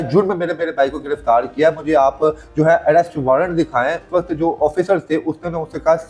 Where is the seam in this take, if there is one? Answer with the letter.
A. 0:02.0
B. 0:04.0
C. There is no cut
B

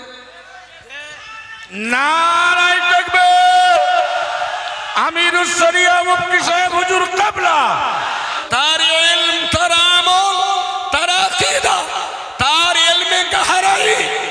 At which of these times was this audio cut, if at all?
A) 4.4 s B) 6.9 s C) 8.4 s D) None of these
C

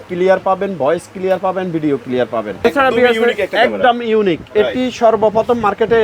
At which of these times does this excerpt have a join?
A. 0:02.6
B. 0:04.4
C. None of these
A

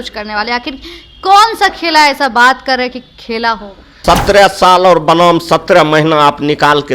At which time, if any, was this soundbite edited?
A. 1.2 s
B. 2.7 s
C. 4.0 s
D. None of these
C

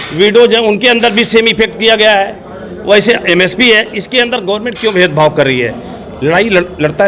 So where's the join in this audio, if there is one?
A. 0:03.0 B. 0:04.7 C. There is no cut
C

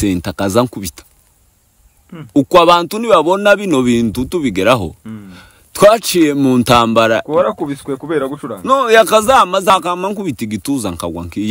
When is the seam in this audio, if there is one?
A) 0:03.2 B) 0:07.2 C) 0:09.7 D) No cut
C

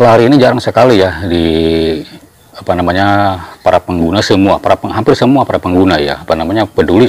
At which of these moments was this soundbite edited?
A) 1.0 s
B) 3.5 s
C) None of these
C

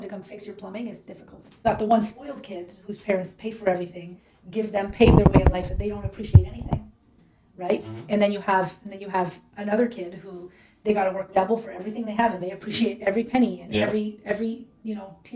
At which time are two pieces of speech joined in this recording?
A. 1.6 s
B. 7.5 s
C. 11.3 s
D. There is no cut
A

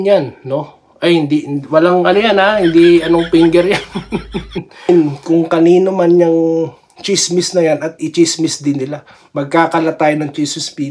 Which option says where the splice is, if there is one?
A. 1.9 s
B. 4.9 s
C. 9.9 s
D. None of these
B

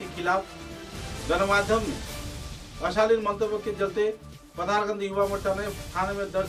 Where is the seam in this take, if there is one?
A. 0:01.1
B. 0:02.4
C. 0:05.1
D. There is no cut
D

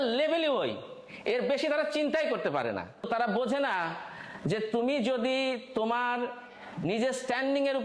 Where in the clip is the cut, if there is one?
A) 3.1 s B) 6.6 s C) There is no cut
A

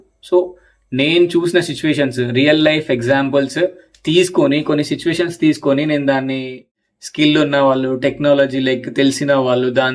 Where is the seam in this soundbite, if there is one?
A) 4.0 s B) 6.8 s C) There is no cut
B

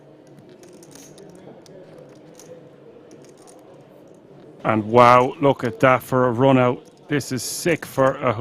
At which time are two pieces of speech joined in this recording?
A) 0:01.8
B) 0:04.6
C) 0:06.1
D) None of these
B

